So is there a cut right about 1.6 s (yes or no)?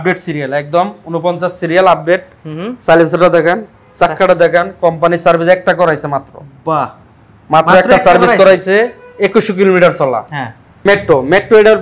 no